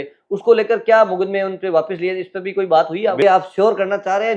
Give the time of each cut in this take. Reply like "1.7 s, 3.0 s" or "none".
3.2 s